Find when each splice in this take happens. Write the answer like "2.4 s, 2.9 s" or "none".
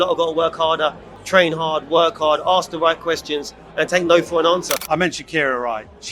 1.1 s, 4.8 s